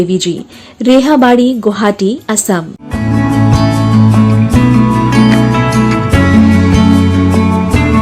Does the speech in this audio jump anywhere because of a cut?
yes; 2 cuts; at 2.8 s, 4.8 s

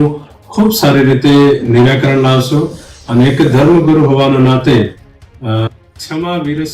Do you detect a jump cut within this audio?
no; 0 cuts

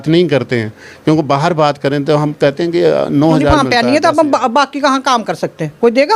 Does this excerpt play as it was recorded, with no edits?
no; 1 cut; at 3.5 s

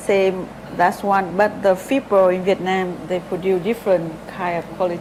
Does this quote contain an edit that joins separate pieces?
no; 0 cuts

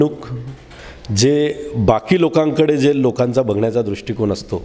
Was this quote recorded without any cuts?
yes; 0 cuts

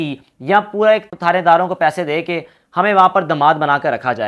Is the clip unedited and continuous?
no; 1 cut; at 1.1 s

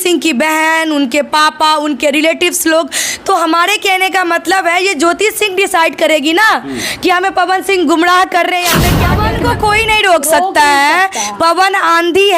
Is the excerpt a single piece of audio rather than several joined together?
no; 1 cut; at 8.9 s

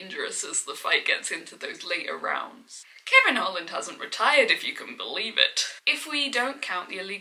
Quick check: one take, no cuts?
no; 2 cuts; at 2.8 s, 5.7 s

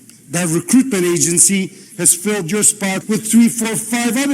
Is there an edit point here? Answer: yes; 1 cut; at 3.0 s

